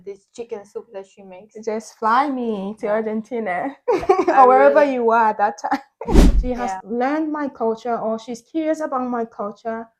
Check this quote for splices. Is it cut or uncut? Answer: cut